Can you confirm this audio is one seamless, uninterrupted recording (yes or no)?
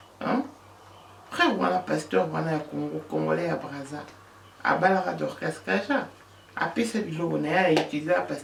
yes